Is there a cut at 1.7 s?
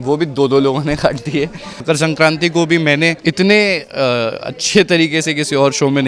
yes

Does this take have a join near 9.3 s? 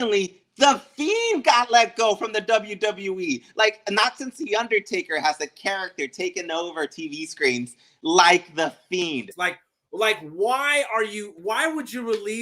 yes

